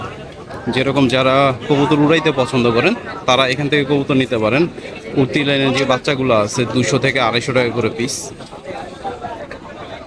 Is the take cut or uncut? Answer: uncut